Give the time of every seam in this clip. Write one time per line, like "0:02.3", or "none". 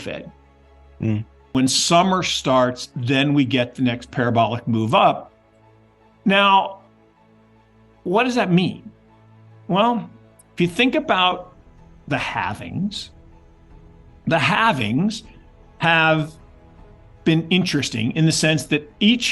0:01.5